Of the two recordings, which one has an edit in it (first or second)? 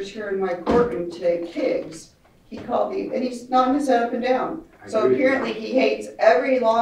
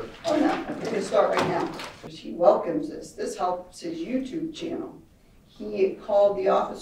second